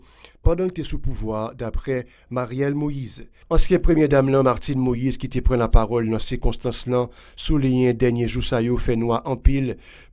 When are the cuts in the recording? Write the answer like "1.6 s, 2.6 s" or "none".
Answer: 3.4 s